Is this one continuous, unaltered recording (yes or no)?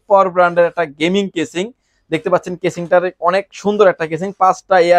yes